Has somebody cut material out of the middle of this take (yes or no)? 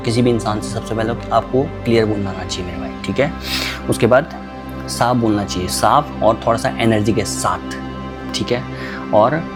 no